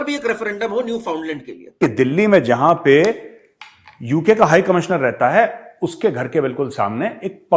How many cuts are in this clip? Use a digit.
1